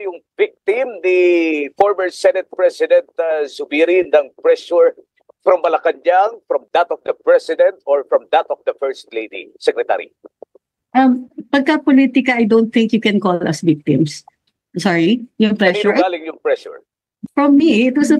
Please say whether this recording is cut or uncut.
cut